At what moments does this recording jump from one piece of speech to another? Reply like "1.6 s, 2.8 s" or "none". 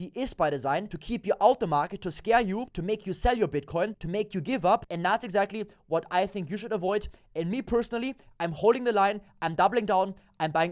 1.0 s, 2.7 s, 4.0 s, 4.9 s